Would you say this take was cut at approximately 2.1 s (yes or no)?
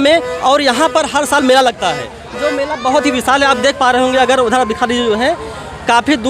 no